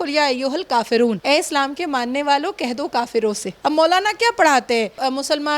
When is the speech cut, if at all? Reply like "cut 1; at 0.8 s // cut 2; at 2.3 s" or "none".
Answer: cut 1; at 3.6 s